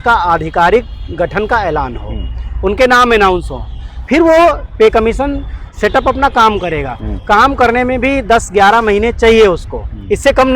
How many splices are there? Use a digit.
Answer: 0